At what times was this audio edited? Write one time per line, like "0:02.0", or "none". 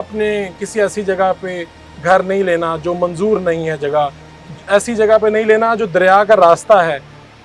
none